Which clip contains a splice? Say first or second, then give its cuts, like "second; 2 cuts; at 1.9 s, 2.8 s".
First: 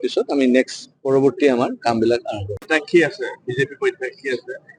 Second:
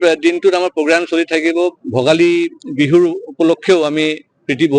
first; 1 cut; at 2.6 s